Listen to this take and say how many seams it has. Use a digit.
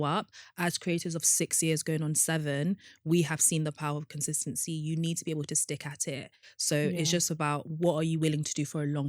1